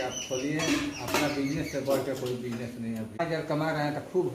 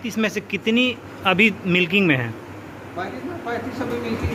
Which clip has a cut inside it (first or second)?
first